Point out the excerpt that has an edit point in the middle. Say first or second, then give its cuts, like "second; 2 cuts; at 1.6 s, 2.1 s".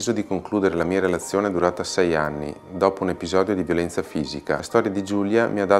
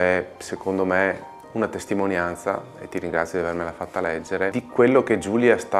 first; 1 cut; at 4.6 s